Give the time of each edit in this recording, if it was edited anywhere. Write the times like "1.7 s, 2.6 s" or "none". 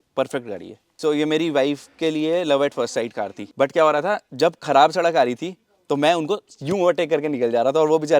1.0 s, 3.4 s